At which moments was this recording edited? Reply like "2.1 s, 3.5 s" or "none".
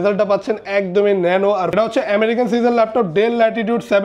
1.7 s